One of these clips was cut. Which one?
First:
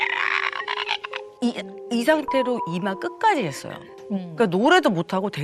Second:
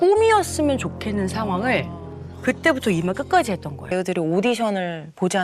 second; 1 cut; at 3.9 s

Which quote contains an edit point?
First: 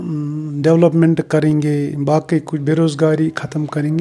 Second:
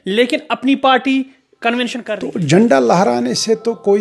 second; 1 cut; at 2.0 s

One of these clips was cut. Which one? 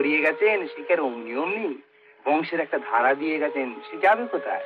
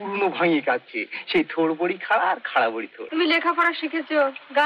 second; 1 cut; at 2.9 s

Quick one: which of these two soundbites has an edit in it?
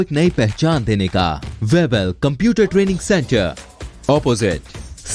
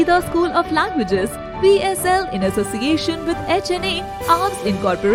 first; 1 cut; at 1.5 s

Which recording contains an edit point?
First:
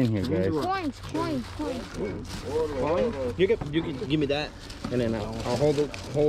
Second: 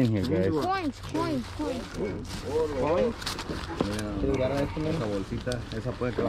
second; 1 cut; at 3.2 s

